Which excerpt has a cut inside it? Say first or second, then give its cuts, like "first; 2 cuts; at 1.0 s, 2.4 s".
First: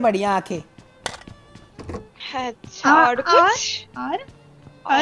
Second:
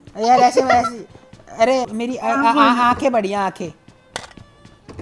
second; 1 cut; at 1.9 s